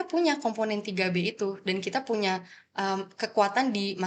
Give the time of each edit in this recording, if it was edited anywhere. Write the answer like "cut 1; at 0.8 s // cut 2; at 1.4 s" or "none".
none